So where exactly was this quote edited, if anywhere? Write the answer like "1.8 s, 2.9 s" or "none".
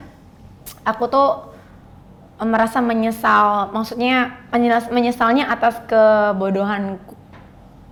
none